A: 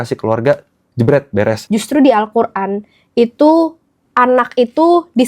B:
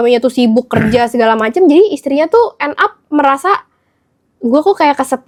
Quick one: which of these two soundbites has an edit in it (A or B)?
A